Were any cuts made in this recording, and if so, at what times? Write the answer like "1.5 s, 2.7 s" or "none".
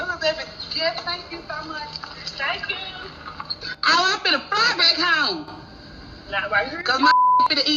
3.7 s